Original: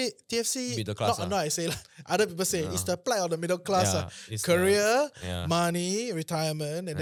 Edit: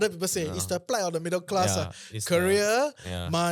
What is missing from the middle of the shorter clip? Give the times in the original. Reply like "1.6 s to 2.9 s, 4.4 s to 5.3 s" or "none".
none